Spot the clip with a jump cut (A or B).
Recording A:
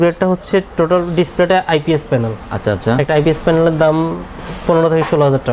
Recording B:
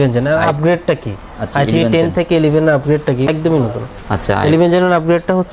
B